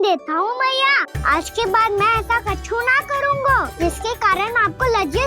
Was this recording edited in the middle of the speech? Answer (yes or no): yes